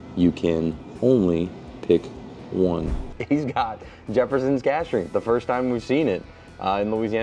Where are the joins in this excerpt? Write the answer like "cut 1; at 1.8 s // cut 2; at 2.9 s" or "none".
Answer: cut 1; at 3.1 s